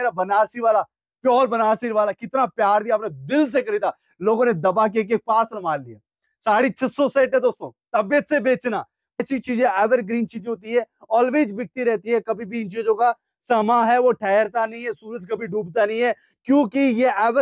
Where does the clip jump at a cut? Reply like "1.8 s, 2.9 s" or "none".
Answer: 9.2 s